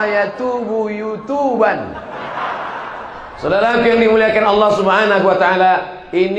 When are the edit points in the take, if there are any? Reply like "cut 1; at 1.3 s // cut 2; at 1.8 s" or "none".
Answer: cut 1; at 3.2 s